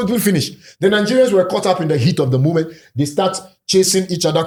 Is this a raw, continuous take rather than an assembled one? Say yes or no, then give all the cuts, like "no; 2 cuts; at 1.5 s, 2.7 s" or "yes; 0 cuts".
yes; 0 cuts